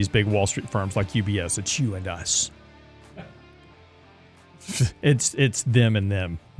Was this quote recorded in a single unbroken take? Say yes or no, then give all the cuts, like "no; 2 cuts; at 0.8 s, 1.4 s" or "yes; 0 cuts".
yes; 0 cuts